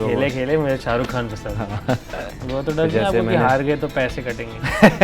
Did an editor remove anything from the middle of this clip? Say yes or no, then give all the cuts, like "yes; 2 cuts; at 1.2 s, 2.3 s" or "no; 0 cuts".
yes; 1 cut; at 2.4 s